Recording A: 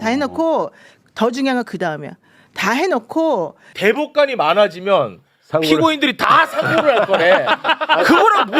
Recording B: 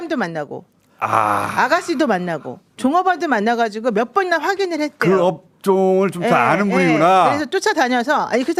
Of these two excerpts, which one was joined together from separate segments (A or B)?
A